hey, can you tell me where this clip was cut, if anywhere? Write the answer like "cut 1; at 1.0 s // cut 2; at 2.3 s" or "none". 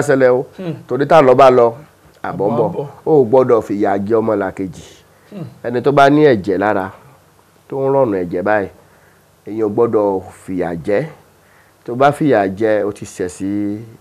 none

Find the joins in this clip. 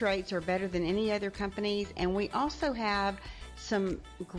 none

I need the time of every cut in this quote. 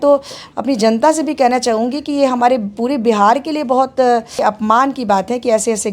cut 1; at 4.3 s

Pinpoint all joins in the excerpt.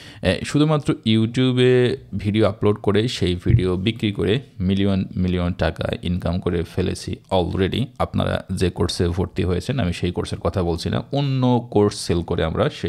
none

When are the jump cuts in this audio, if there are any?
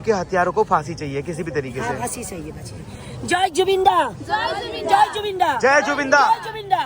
none

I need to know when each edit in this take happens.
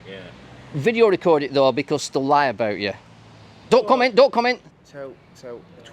cut 1; at 4.7 s

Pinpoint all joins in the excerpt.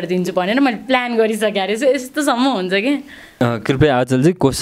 cut 1; at 3.3 s

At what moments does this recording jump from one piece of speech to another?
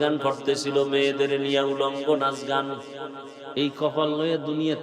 cut 1; at 3.5 s

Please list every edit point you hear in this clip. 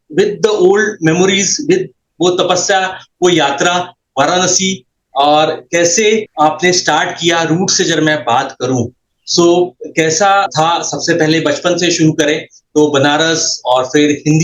none

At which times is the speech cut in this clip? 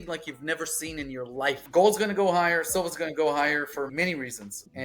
cut 1; at 1.6 s

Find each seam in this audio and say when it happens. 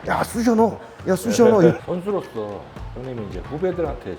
cut 1; at 1.8 s

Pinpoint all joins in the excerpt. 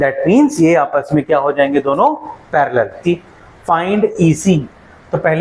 cut 1; at 3.0 s

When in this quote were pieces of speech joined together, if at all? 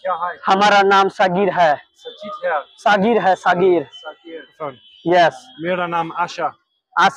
cut 1; at 4.5 s

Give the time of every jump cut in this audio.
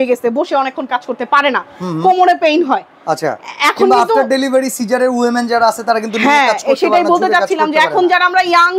none

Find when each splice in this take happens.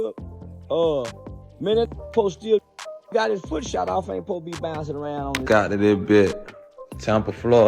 cut 1; at 5.4 s

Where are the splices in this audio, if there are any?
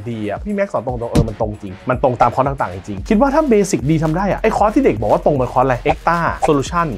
cut 1; at 2.9 s

